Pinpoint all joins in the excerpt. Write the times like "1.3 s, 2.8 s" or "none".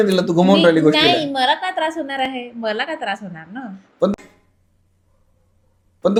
none